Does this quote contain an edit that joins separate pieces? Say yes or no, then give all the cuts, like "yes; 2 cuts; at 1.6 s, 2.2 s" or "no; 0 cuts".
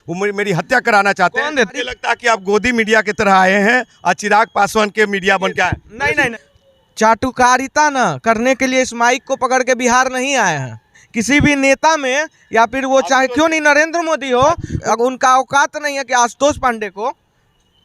yes; 4 cuts; at 1.7 s, 6.3 s, 11.0 s, 14.7 s